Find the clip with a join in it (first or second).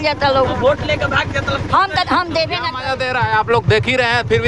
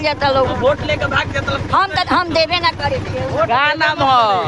first